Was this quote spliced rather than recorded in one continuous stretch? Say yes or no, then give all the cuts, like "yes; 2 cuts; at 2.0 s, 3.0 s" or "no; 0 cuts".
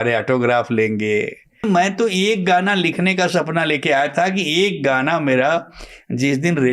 yes; 1 cut; at 1.6 s